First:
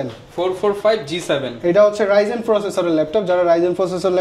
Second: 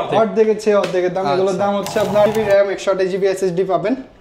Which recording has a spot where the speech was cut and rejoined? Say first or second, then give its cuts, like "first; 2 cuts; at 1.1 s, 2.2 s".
second; 1 cut; at 2.3 s